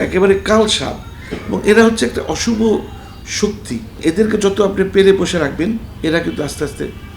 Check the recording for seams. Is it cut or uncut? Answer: cut